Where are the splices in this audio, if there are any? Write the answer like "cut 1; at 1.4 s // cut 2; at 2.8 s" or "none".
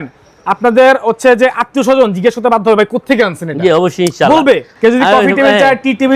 cut 1; at 4.7 s